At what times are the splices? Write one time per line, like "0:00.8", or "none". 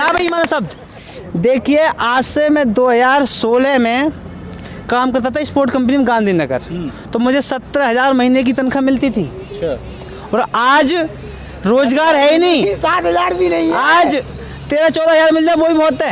0:01.2